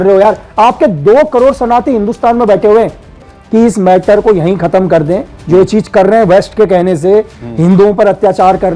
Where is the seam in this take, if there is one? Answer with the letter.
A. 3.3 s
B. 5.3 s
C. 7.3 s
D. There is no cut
A